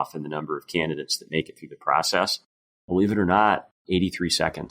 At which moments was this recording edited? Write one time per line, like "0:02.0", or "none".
0:03.7